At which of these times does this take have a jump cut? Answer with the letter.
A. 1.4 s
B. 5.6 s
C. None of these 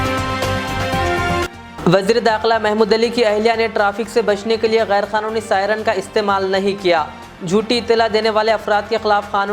A